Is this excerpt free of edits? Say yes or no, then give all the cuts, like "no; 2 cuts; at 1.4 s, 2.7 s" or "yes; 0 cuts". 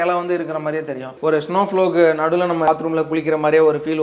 no; 2 cuts; at 1.2 s, 2.7 s